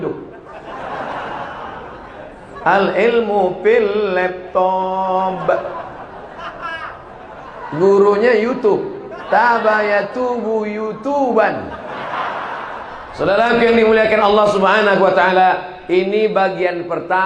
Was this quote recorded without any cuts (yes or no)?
no